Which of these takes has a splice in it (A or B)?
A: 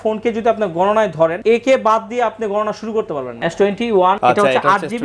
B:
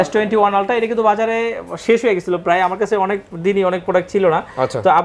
A